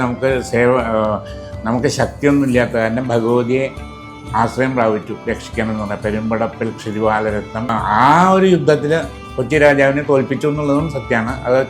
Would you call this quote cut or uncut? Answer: cut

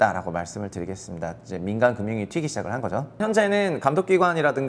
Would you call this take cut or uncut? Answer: cut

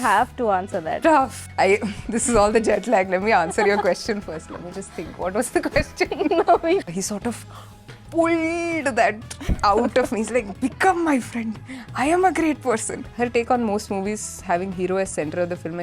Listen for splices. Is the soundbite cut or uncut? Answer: cut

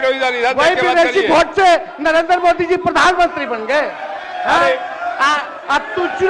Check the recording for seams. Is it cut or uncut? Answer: uncut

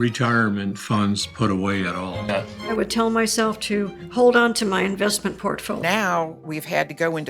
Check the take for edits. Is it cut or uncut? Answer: cut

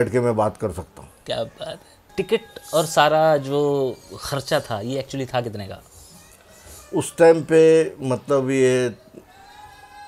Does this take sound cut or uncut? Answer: cut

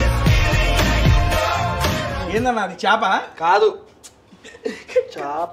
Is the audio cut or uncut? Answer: uncut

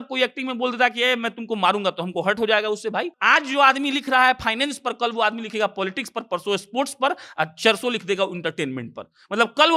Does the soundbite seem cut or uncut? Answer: cut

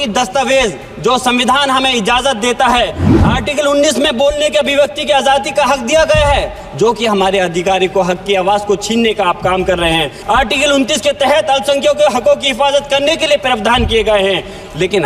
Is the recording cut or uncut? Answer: cut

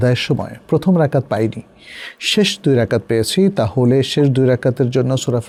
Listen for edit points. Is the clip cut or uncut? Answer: uncut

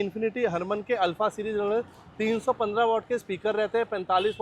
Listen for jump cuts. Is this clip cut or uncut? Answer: uncut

